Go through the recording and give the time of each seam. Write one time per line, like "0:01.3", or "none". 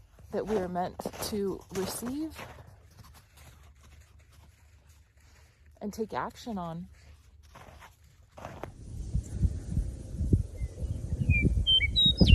0:08.9

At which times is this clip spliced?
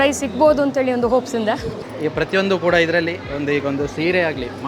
0:01.8

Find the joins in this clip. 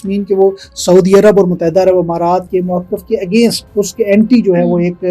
0:02.5
0:03.6

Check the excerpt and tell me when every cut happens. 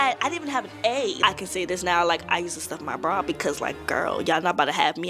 0:01.1

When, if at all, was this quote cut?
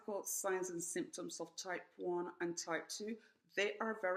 none

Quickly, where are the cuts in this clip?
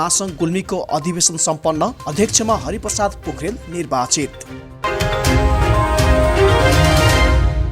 0:04.8

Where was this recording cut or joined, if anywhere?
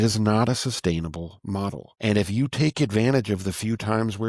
0:01.9

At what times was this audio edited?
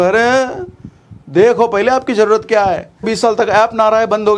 0:03.0

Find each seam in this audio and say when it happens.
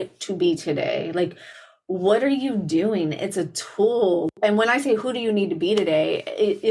0:04.3

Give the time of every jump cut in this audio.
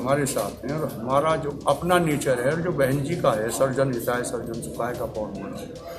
none

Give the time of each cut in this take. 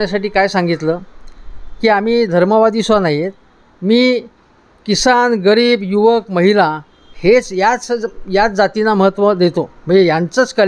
none

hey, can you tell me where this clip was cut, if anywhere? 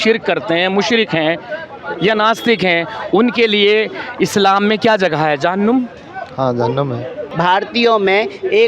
0:07.2

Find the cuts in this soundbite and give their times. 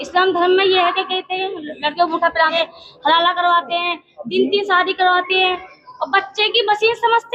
0:02.5

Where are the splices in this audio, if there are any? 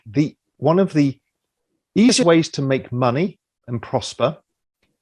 0:02.2

